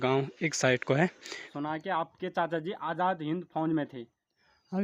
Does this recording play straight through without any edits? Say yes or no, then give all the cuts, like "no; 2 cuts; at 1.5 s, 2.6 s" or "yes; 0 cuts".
no; 1 cut; at 1.5 s